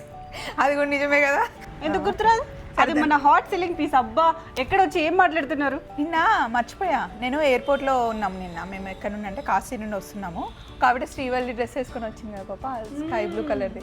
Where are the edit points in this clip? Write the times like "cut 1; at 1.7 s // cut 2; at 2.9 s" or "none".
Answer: cut 1; at 1.7 s // cut 2; at 5.8 s